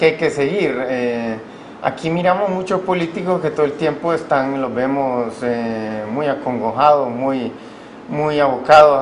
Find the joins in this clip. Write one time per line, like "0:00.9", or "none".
0:06.8